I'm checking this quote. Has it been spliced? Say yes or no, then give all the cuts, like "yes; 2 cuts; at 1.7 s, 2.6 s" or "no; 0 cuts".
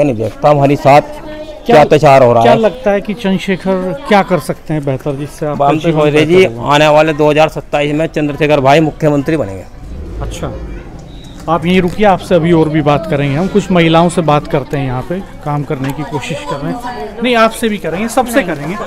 no; 0 cuts